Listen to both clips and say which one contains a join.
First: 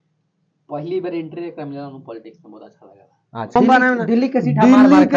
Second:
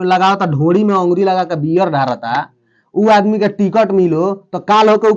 first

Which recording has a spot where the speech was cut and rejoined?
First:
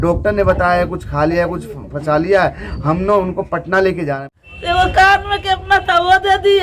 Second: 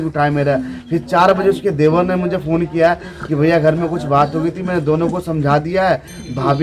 first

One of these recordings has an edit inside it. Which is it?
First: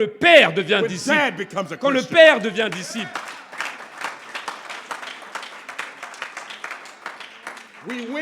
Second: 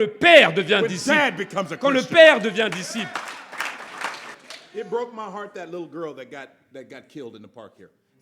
second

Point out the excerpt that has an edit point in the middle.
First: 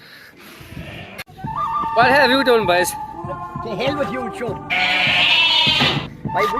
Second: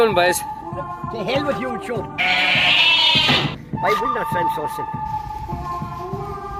first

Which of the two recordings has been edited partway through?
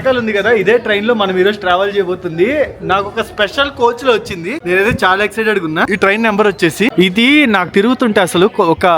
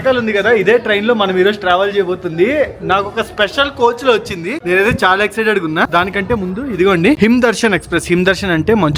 first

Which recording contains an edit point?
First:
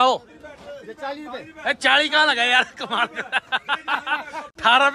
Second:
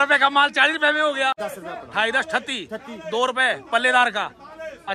second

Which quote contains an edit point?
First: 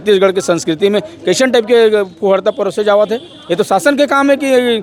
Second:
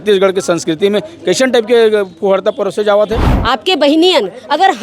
second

